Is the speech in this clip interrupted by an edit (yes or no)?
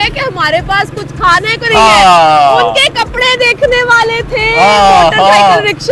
no